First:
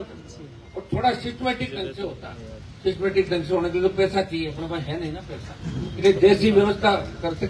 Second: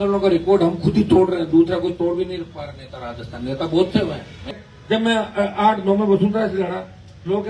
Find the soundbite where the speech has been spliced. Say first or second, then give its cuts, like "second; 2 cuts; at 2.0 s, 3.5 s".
second; 1 cut; at 4.5 s